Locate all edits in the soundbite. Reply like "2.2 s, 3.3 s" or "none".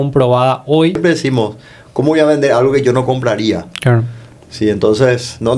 1.0 s